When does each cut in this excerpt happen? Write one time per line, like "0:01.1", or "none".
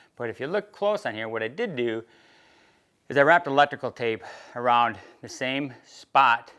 none